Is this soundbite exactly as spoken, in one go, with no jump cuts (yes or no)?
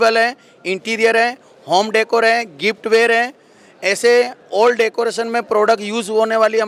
yes